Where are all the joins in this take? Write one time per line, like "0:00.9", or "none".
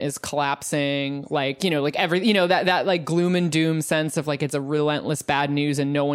none